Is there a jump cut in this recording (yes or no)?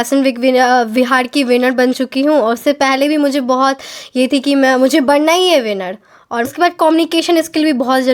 yes